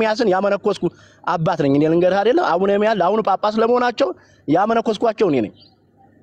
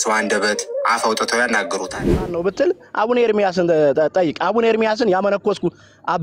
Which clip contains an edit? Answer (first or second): second